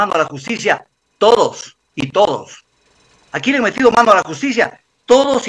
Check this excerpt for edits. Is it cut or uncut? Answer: uncut